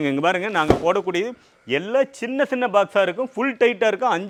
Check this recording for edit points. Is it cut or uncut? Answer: uncut